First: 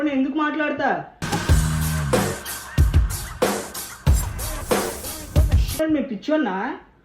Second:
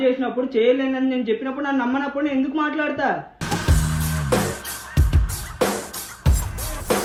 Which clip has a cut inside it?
first; 1 cut; at 5.8 s

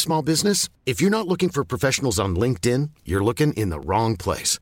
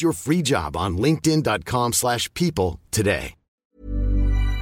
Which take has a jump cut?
second; 1 cut; at 3.7 s

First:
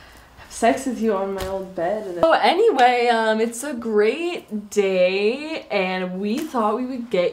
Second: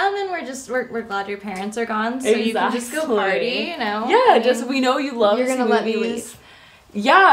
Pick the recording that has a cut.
first; 1 cut; at 3.8 s

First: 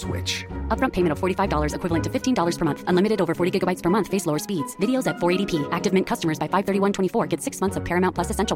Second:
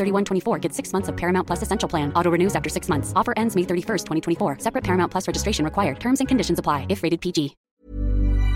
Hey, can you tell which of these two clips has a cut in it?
second; 1 cut; at 7.6 s

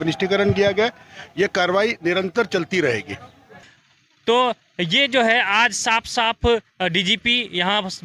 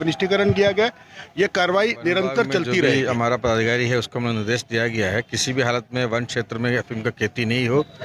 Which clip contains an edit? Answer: second; 1 cut; at 2.9 s

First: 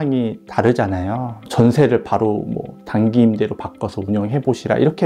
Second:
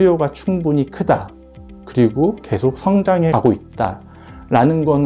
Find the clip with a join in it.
first; 1 cut; at 1.4 s

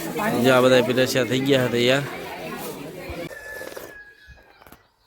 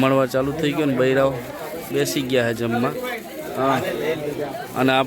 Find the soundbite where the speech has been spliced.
first; 1 cut; at 3.3 s

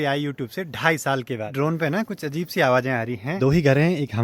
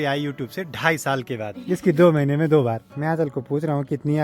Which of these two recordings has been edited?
first; 2 cuts; at 1.5 s, 3.3 s

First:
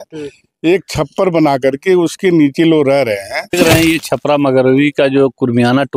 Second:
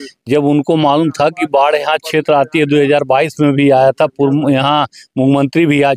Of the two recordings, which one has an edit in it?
first; 1 cut; at 3.5 s

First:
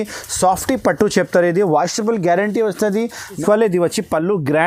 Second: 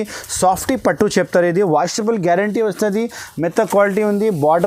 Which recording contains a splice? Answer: first; 1 cut; at 3.4 s

